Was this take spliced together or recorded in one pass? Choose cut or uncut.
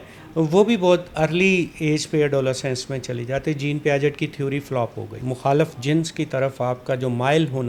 cut